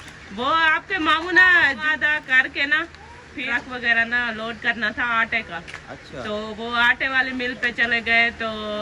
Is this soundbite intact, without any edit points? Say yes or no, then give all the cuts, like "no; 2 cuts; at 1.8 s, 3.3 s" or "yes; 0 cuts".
no; 2 cuts; at 1.8 s, 3.5 s